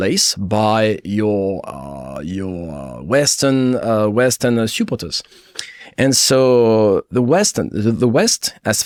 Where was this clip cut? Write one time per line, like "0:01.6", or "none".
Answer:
none